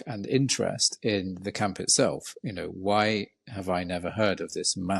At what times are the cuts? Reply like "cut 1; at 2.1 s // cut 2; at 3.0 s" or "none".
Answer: none